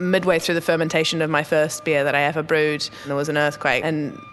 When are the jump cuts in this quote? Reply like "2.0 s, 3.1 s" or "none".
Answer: 3.1 s